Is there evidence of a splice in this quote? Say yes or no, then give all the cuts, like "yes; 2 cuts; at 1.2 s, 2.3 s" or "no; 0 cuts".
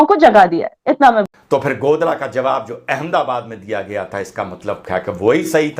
yes; 1 cut; at 1.3 s